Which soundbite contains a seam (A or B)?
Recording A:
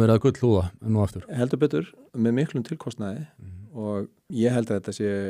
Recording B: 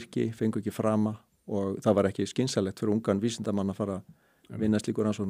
A